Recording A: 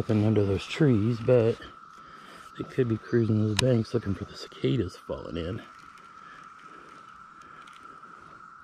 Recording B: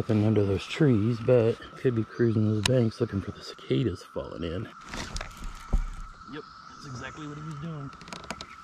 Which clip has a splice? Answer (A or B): B